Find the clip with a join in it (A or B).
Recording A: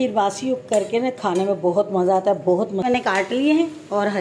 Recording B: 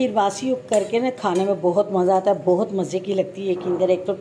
A